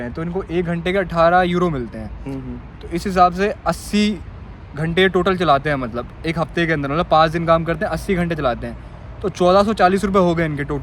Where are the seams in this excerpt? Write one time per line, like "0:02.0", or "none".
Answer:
none